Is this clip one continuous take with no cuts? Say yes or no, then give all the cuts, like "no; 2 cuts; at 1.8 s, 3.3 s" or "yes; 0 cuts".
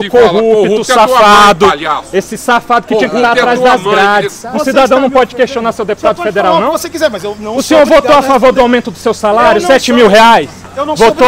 no; 1 cut; at 4.4 s